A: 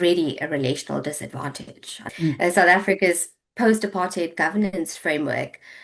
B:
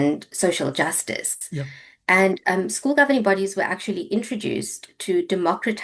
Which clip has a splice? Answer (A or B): A